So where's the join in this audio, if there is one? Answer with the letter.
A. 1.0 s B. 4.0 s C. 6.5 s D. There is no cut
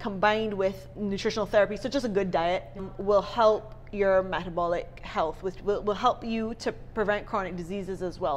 D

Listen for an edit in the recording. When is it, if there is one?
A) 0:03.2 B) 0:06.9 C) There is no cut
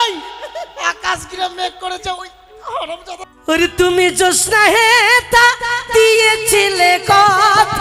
A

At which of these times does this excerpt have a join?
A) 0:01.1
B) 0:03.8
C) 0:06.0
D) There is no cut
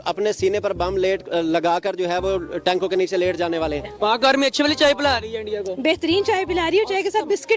B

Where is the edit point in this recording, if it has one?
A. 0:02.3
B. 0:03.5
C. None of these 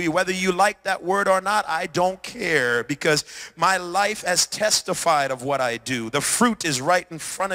C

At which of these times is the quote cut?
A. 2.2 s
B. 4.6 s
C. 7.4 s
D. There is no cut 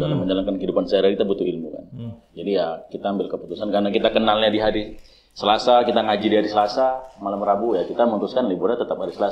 D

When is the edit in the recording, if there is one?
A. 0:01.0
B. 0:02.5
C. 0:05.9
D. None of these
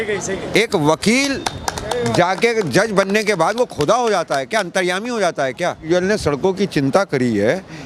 C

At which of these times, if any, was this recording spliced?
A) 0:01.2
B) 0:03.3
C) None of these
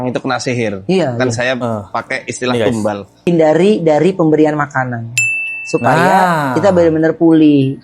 B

